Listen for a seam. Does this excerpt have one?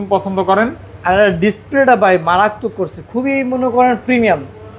no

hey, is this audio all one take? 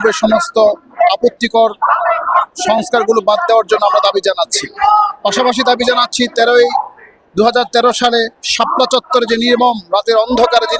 yes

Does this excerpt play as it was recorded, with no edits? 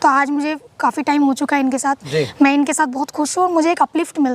no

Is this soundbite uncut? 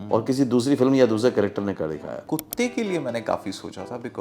no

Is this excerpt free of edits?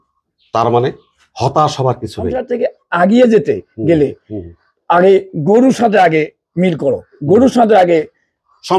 no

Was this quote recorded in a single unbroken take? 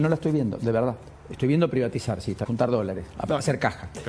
no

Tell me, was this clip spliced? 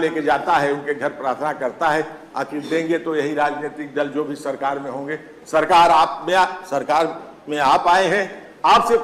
no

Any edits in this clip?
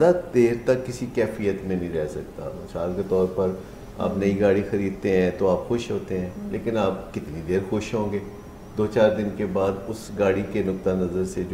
no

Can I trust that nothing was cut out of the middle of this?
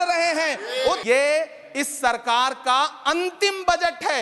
no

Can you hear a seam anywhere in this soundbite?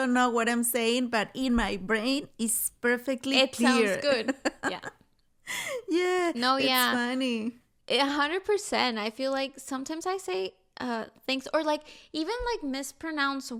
no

